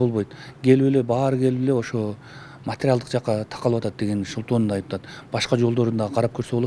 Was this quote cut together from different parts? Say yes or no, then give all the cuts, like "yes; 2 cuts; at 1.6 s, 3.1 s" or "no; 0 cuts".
no; 0 cuts